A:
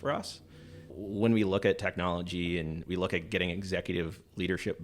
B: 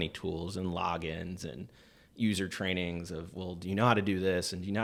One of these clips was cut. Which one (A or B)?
A